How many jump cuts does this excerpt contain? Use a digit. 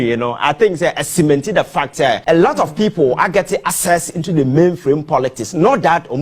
1